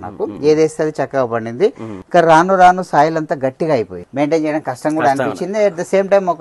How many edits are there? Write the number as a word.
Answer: two